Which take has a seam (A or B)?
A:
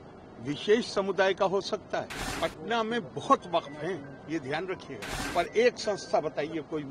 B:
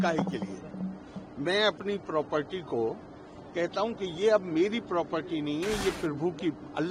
A